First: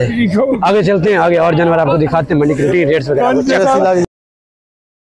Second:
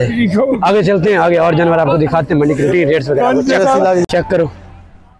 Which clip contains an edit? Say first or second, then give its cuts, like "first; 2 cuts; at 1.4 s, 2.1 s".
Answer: second; 1 cut; at 4.1 s